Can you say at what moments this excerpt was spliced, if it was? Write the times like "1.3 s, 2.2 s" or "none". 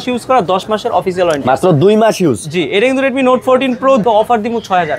4.0 s